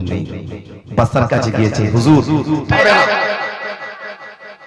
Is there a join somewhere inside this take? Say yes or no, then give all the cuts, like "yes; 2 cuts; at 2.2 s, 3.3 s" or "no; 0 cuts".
yes; 1 cut; at 2.7 s